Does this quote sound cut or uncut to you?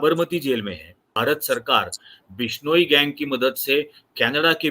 cut